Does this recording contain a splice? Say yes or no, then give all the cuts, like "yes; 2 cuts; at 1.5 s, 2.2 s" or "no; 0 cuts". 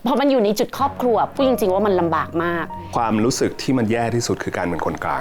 yes; 1 cut; at 2.6 s